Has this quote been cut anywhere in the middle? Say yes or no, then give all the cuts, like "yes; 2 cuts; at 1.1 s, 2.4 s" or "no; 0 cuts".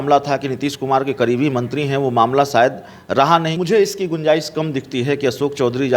yes; 1 cut; at 3.6 s